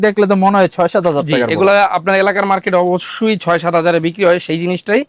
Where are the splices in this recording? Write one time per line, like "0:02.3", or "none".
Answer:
none